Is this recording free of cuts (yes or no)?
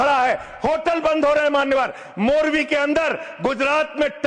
yes